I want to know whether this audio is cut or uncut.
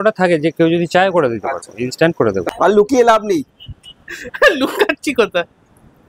cut